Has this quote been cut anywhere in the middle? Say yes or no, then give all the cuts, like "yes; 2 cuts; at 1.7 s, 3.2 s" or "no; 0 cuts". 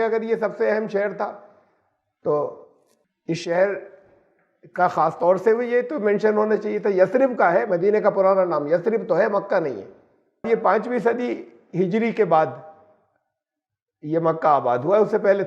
yes; 1 cut; at 10.4 s